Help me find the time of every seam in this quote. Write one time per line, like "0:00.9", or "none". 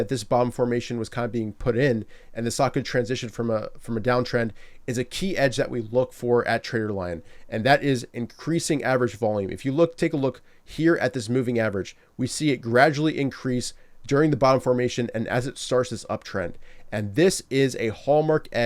none